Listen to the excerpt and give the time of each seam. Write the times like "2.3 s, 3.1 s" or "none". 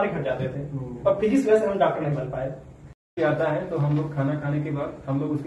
3.1 s

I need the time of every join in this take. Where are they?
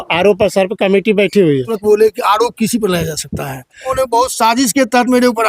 1.7 s, 3.9 s

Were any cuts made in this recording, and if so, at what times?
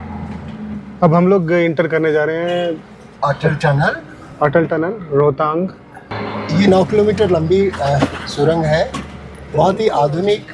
6.2 s

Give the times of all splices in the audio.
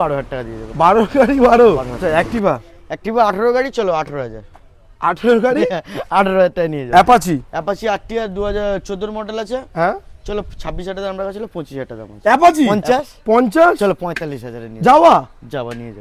1.9 s, 6.8 s, 12.7 s

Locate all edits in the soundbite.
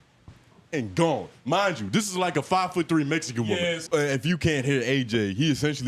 3.8 s

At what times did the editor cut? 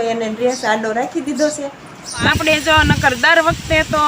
2.2 s

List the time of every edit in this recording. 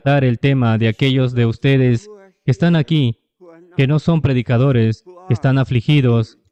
none

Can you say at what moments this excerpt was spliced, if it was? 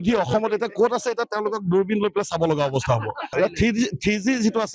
3.2 s

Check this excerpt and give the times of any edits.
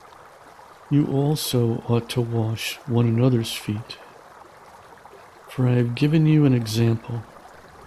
3.9 s, 5.5 s

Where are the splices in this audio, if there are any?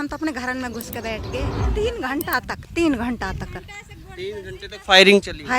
1.6 s

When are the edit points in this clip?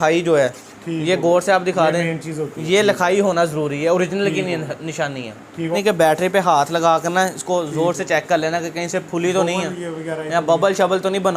5.7 s

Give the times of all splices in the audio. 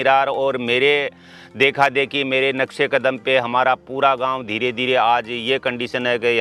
none

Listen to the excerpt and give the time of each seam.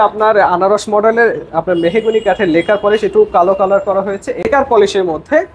4.5 s

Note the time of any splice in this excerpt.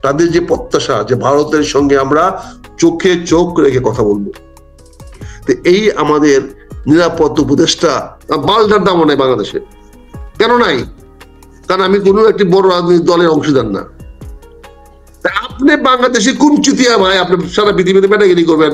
8.1 s

